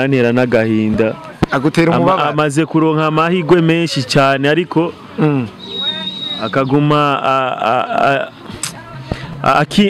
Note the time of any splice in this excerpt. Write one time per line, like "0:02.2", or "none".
none